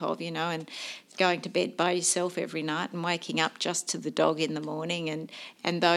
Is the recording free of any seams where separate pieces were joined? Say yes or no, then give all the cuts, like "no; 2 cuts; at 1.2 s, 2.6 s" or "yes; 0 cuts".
yes; 0 cuts